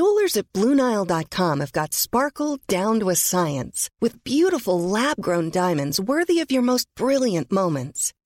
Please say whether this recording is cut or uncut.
uncut